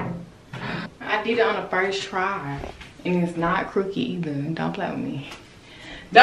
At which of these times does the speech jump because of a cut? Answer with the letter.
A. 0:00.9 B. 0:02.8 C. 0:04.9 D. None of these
A